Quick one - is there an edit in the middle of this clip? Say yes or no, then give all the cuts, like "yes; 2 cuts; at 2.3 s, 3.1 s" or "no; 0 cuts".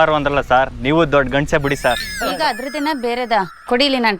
yes; 1 cut; at 2.1 s